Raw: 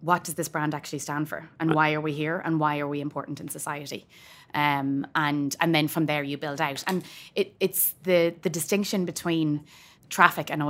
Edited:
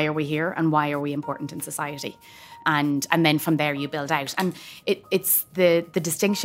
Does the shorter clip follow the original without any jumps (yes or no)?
no